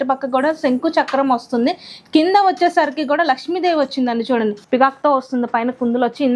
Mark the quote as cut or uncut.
cut